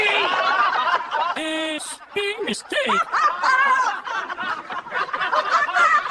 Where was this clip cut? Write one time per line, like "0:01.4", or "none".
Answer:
none

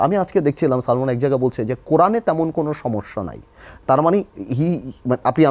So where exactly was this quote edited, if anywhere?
none

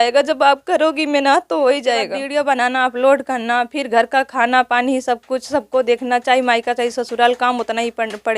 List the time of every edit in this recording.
0:02.2

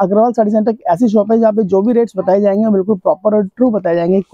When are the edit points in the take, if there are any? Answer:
none

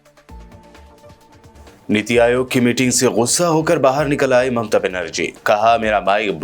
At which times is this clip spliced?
0:01.2

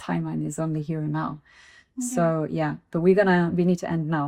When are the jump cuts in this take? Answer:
none

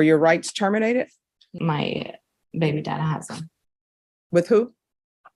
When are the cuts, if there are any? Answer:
0:01.5

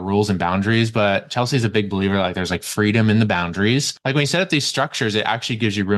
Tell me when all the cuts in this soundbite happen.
0:03.9

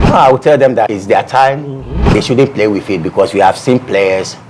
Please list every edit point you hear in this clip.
0:00.9
0:02.1

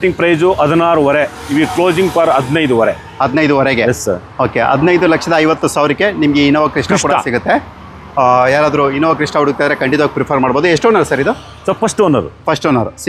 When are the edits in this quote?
none

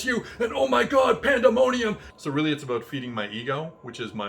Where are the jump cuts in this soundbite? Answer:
0:02.1

